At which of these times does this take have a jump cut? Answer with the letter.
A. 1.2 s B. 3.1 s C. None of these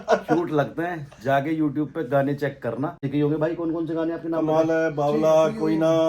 B